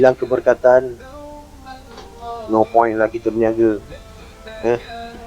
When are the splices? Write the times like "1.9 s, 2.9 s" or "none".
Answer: none